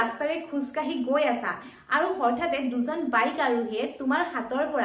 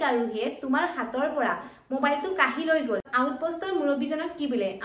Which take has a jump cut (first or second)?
second